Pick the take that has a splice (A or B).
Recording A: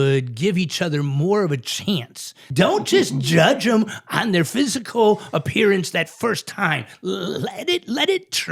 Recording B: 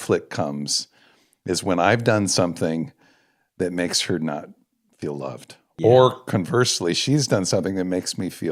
A